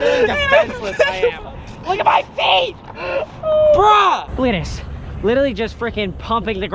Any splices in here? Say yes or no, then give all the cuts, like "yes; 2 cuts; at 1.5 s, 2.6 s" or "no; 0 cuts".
yes; 1 cut; at 4.3 s